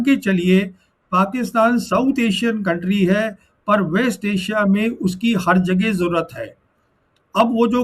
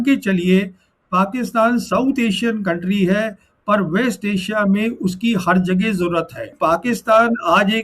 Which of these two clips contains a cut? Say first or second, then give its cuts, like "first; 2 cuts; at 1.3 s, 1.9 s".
second; 1 cut; at 6.6 s